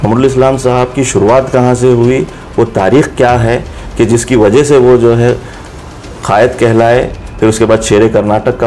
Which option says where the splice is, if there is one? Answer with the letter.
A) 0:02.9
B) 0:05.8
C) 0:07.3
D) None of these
D